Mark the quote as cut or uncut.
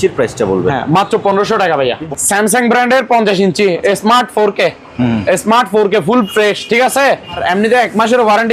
cut